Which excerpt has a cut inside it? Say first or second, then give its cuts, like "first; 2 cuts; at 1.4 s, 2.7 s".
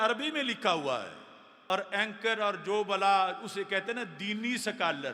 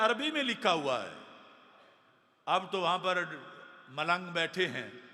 first; 1 cut; at 1.7 s